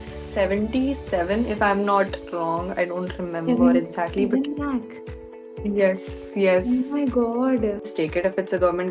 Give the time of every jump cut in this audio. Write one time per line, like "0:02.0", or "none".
0:07.9